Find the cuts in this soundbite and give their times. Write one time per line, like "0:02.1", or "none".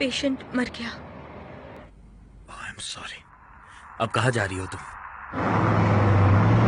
none